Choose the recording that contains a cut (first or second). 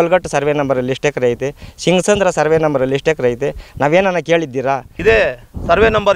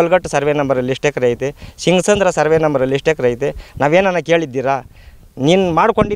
first